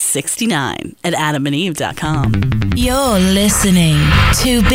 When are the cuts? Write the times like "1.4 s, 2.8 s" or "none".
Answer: 2.2 s